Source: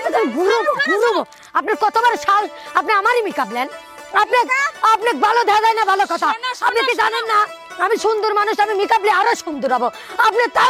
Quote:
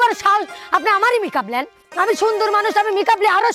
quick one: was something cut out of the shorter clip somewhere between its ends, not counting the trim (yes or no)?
yes